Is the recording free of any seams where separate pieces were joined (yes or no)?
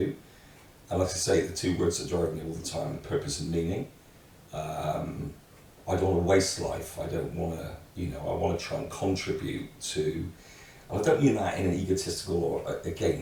yes